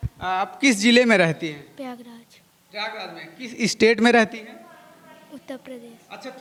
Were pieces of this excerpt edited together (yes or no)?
no